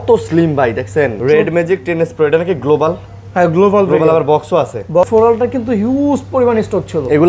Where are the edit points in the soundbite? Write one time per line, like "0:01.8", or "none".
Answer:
0:01.2
0:05.1